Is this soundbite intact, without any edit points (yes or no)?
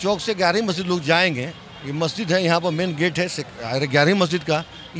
yes